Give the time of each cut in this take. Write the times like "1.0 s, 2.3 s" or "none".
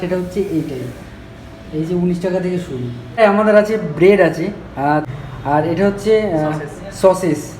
3.2 s, 5.0 s